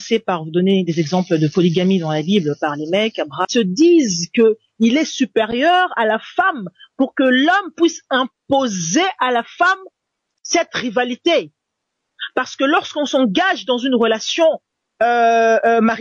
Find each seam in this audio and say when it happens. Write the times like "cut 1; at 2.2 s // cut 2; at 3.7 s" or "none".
cut 1; at 3.4 s

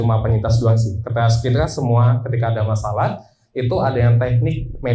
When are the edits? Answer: none

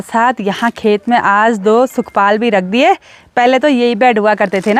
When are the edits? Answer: none

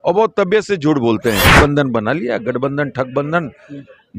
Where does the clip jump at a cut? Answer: cut 1; at 1.5 s

